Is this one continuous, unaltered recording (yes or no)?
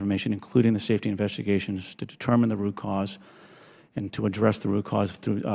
yes